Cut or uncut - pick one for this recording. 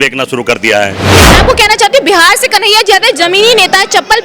cut